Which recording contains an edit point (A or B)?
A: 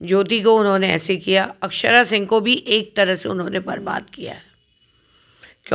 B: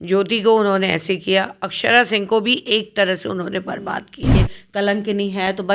B